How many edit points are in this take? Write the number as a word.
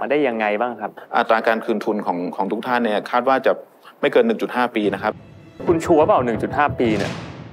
one